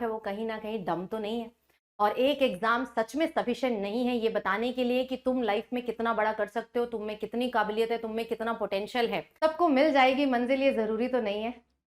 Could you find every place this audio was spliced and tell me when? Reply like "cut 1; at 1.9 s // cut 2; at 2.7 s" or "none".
cut 1; at 9.3 s